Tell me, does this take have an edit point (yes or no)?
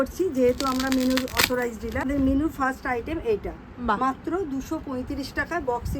no